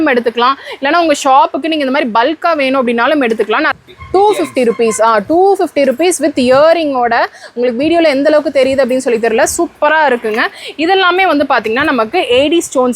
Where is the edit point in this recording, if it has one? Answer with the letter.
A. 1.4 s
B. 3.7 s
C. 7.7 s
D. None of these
B